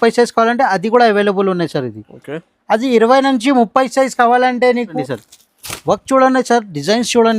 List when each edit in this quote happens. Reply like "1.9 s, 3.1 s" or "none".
5.0 s